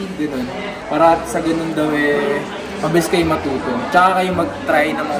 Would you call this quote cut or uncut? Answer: uncut